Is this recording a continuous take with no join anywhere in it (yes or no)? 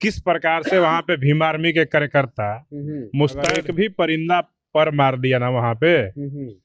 no